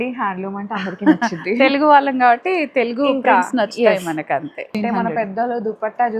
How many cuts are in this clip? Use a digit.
1